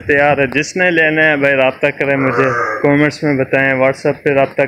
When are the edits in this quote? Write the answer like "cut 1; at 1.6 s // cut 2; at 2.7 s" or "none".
none